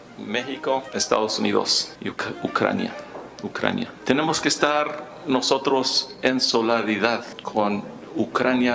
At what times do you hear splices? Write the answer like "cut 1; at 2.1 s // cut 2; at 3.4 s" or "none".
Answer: cut 1; at 0.9 s // cut 2; at 1.9 s // cut 3; at 4.0 s // cut 4; at 7.4 s